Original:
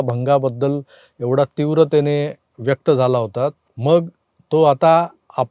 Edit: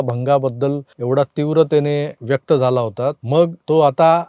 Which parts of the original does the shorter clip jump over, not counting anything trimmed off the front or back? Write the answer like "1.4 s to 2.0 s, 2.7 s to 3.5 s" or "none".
0.9 s to 1.1 s, 2.4 s to 2.5 s, 3.7 s to 4.2 s

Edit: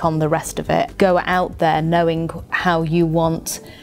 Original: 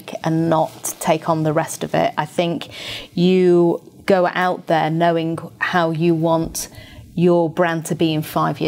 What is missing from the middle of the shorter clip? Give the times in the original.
2.2 s to 4.0 s

